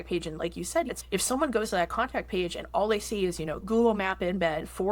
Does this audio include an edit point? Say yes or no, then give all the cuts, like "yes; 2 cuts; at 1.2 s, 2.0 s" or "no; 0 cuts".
yes; 2 cuts; at 0.9 s, 3.6 s